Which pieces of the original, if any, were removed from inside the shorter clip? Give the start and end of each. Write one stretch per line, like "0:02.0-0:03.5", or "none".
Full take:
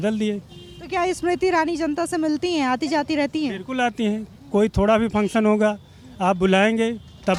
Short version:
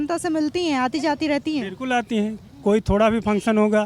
none